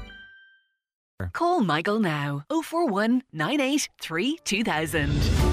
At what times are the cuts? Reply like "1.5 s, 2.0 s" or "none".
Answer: 1.0 s